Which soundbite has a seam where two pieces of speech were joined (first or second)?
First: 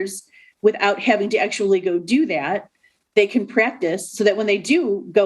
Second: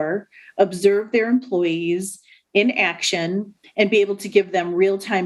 first